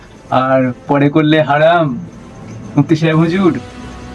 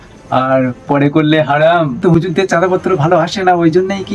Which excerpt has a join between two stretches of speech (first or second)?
second